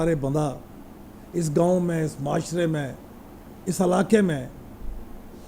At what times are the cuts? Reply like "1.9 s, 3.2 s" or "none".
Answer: none